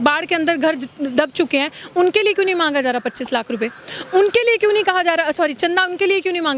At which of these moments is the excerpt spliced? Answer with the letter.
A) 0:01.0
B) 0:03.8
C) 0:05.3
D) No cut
D